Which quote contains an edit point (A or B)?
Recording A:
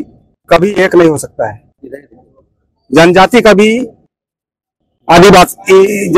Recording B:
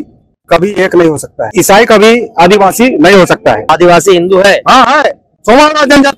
B